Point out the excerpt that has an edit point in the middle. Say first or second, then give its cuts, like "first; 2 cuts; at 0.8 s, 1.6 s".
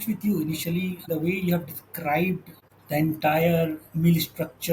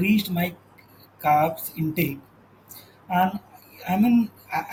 first; 2 cuts; at 1.1 s, 2.6 s